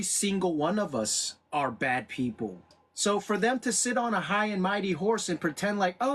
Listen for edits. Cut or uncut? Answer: cut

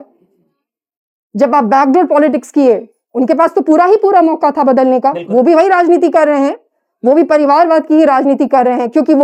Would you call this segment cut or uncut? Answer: uncut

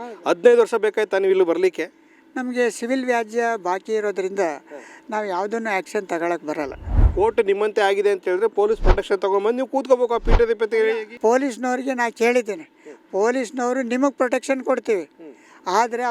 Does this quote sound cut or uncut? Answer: cut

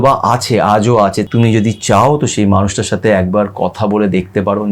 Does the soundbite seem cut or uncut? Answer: cut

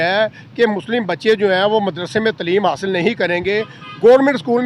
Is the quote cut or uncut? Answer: uncut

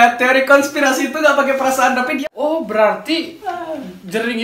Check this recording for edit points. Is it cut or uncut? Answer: cut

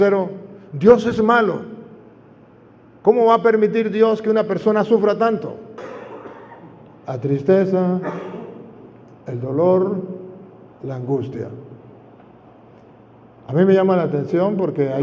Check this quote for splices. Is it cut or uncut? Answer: cut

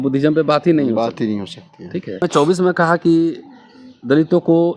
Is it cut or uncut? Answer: cut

